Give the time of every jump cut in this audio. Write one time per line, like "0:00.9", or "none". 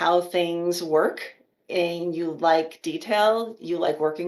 none